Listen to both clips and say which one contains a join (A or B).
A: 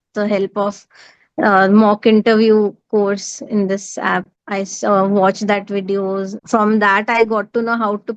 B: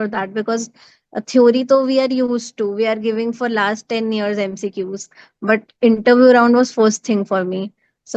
A